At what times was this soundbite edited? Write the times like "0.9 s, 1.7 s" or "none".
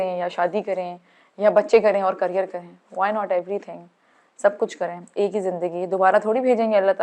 none